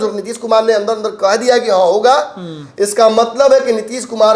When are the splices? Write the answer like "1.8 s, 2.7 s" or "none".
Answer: none